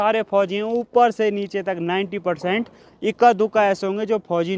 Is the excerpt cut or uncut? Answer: uncut